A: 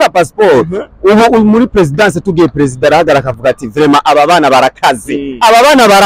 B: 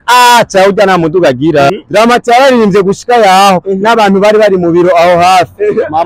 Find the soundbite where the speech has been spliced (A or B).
B